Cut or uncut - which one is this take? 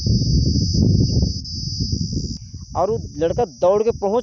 cut